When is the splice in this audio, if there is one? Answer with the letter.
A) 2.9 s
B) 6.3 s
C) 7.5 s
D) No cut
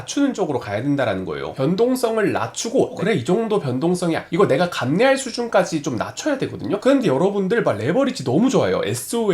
A